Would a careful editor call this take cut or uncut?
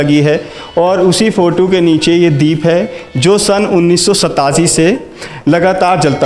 uncut